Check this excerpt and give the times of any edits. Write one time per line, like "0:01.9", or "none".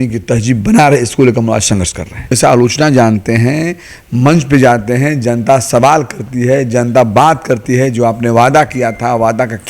0:02.4